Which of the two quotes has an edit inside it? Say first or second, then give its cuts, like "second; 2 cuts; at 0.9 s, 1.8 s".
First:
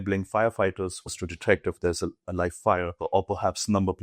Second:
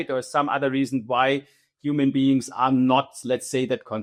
first; 1 cut; at 1.1 s